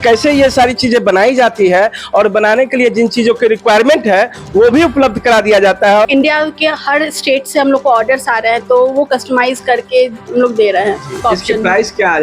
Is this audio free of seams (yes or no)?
no